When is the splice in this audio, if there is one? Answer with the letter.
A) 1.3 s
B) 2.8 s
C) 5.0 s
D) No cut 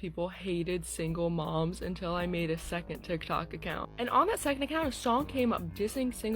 C